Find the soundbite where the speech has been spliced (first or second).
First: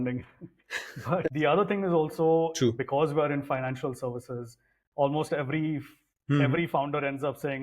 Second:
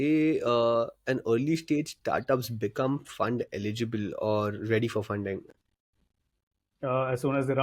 first